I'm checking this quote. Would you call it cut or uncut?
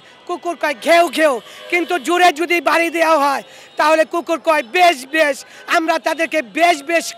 uncut